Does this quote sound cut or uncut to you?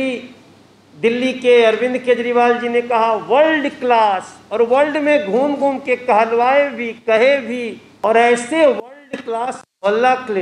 cut